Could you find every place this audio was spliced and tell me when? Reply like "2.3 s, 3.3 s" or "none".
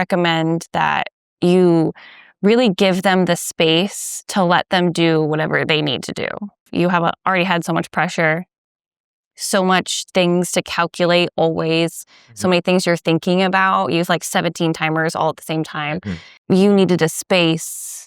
1.2 s, 6.7 s, 16.3 s